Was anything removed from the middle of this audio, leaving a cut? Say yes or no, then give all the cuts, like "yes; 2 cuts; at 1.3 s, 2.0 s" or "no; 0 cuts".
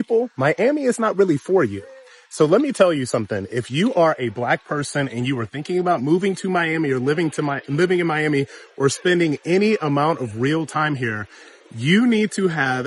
no; 0 cuts